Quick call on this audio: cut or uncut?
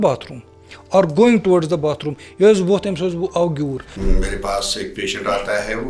cut